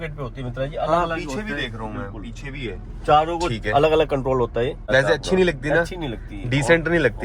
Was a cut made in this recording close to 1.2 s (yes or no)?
no